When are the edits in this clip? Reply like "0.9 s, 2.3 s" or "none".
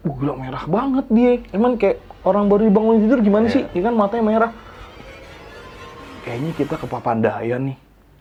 none

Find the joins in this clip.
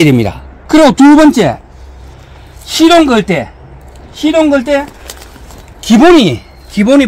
none

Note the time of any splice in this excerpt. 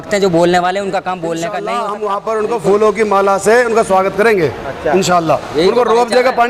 1.6 s

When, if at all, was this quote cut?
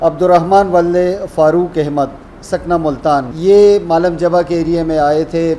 3.3 s

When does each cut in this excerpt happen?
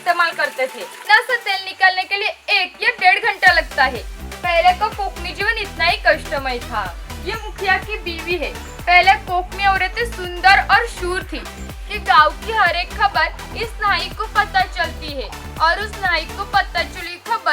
0.9 s, 7.1 s, 11.6 s

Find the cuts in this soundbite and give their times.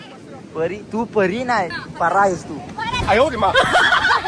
1.8 s

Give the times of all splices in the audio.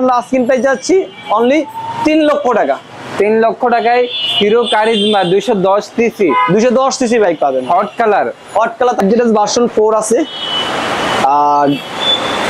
9.0 s

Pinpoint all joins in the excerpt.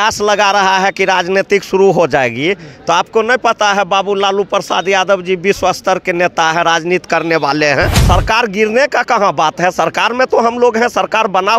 8.0 s

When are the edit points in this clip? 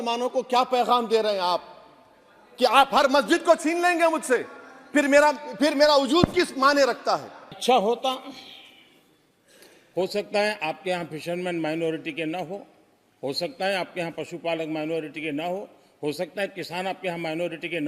7.6 s

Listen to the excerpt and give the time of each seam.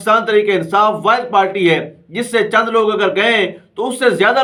none

